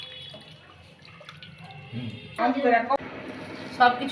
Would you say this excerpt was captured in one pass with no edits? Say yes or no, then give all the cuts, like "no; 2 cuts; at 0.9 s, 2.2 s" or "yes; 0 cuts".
no; 1 cut; at 3.0 s